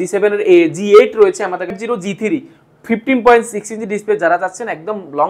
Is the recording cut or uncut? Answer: cut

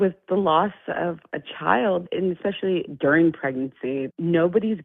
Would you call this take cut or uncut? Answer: cut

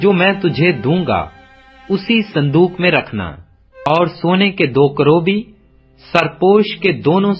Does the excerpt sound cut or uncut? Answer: cut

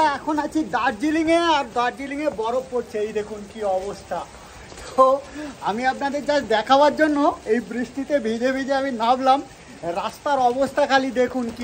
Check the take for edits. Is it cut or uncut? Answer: uncut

